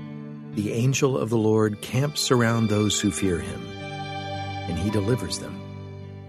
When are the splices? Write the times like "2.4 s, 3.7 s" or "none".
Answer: 5.3 s